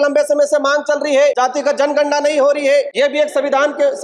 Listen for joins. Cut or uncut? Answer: cut